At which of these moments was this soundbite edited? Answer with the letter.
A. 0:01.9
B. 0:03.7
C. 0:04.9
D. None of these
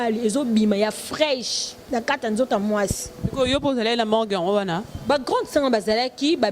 D